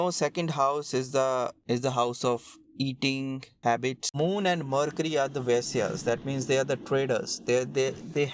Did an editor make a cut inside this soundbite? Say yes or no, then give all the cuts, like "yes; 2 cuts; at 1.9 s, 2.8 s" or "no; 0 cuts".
yes; 1 cut; at 4.0 s